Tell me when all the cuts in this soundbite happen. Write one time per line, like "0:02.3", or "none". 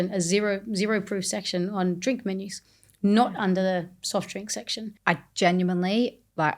0:04.8